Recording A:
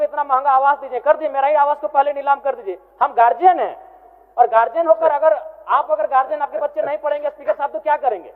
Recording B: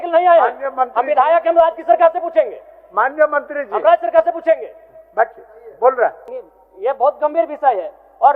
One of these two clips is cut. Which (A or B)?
B